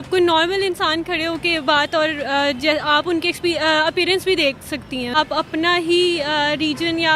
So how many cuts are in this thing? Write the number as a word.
one